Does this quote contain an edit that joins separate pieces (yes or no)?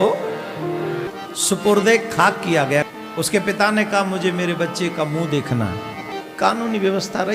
yes